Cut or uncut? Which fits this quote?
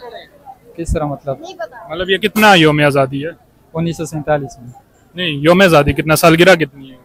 uncut